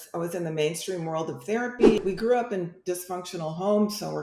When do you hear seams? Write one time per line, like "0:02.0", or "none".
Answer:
0:02.0